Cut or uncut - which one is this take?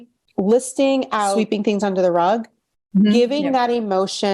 cut